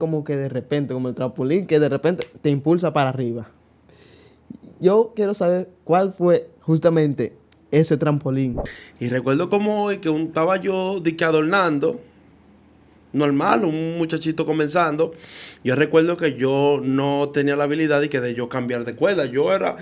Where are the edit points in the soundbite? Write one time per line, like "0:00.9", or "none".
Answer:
0:08.6